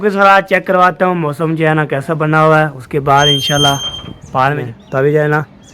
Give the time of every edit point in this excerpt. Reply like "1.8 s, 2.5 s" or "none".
4.6 s